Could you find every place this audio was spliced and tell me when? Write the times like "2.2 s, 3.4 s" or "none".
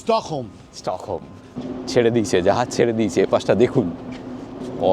1.5 s